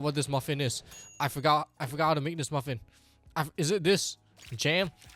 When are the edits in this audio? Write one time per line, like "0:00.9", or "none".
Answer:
none